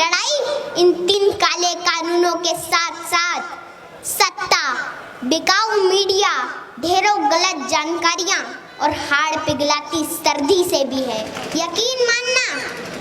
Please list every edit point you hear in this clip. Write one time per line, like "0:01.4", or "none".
0:01.2
0:11.4